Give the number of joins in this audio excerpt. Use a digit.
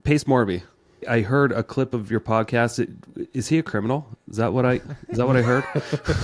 1